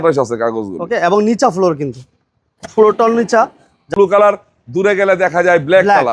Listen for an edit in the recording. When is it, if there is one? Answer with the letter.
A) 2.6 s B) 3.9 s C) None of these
B